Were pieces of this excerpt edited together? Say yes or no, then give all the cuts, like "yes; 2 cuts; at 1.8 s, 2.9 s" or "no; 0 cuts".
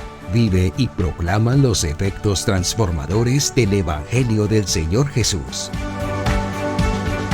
yes; 1 cut; at 5.5 s